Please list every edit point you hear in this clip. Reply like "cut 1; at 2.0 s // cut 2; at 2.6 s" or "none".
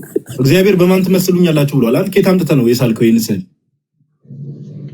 none